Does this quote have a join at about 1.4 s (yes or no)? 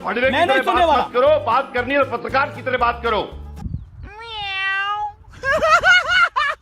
yes